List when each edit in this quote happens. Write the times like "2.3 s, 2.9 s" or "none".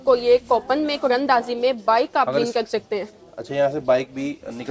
none